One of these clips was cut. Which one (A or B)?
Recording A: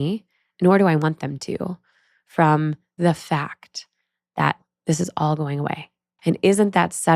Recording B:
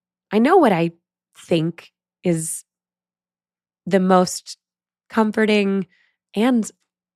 A